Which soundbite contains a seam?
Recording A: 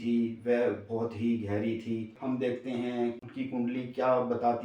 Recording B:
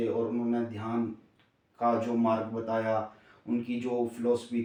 A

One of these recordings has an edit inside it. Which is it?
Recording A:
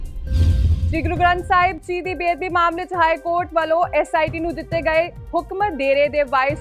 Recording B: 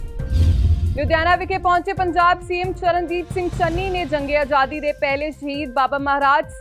B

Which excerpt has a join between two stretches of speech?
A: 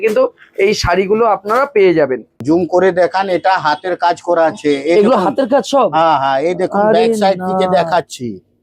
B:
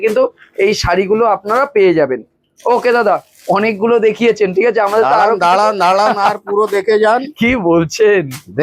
A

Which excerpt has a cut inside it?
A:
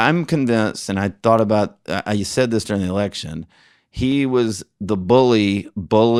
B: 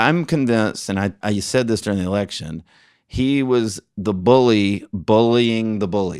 B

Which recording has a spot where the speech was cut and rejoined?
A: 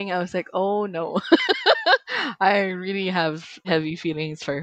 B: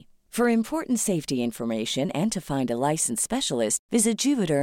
A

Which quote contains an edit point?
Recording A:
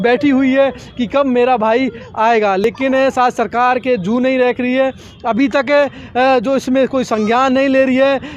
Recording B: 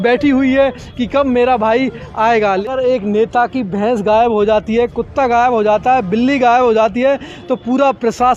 B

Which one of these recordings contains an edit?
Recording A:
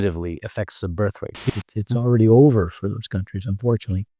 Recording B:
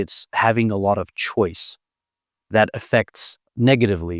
A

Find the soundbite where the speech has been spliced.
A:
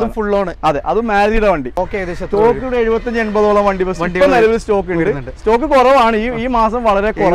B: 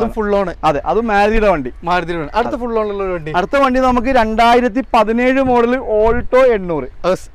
A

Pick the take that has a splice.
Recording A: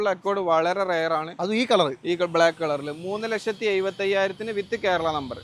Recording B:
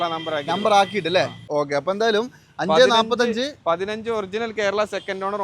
B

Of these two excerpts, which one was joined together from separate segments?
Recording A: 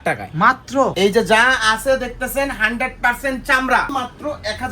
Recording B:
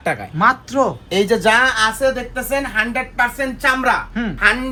A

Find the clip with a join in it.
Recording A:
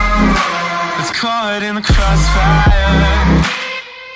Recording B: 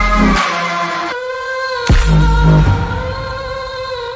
A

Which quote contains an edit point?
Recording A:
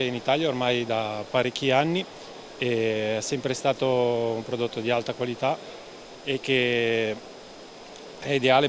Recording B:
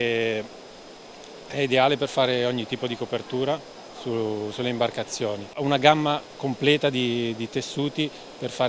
B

